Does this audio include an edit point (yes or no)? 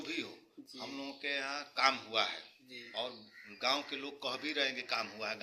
no